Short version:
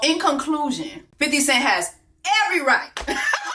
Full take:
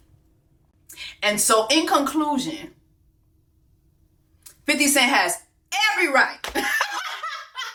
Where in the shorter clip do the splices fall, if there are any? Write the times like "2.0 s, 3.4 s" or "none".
1.0 s

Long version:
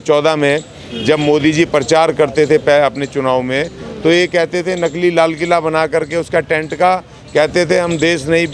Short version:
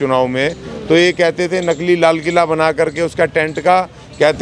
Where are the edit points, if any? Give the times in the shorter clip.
none

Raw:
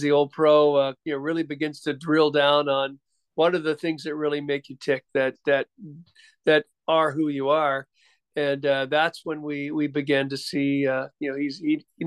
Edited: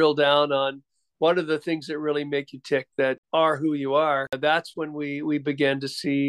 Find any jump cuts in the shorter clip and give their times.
3.2 s, 4.3 s

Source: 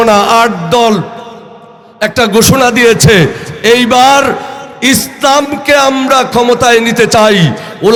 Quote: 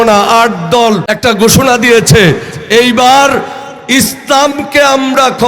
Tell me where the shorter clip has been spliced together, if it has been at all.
1.1 s

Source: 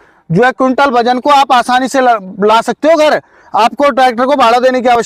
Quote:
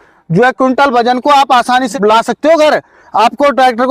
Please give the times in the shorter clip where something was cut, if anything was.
1.9 s

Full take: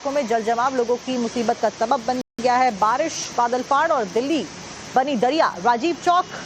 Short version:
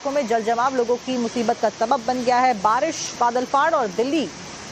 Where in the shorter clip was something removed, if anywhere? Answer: 2.2 s

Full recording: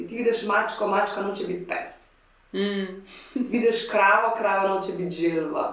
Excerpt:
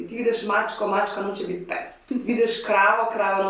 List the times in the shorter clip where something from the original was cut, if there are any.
1.9 s

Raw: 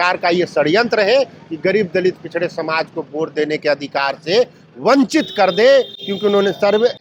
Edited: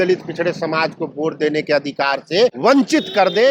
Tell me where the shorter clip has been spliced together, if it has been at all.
2.6 s

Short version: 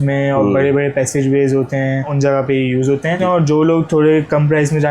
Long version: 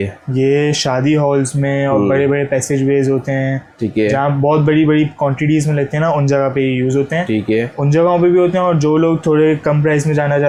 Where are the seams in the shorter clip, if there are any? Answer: 2.1 s, 3.2 s

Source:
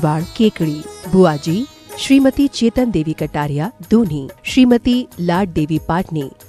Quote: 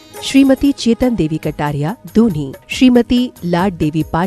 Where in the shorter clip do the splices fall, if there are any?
none

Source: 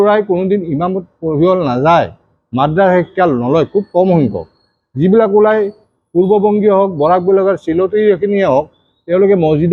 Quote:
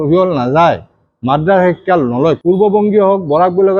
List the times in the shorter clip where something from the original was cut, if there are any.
2.4 s

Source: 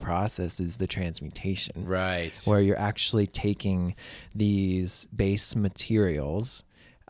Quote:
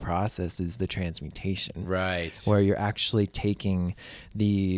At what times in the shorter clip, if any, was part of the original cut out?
none

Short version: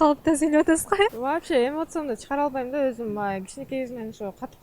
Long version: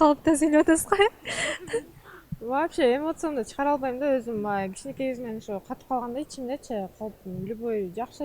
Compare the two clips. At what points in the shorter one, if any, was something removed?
1.2 s

